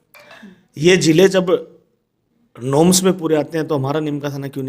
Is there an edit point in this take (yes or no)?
no